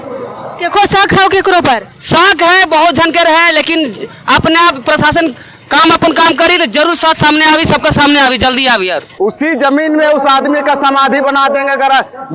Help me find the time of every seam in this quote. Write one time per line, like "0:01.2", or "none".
0:09.1

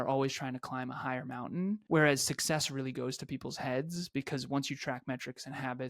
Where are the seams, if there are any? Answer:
0:01.8

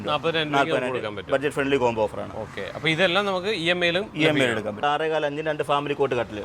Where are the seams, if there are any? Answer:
0:04.8

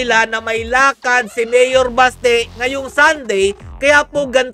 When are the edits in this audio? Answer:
none

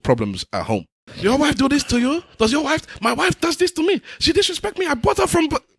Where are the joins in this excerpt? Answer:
0:01.1

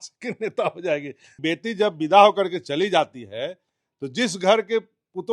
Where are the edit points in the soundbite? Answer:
0:01.4

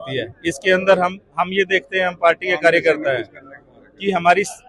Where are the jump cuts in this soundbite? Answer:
none

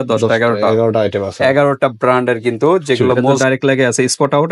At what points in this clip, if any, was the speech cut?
0:03.4

